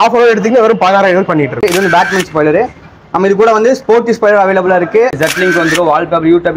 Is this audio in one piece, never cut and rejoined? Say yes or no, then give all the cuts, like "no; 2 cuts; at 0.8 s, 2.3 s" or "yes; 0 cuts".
no; 2 cuts; at 1.6 s, 5.2 s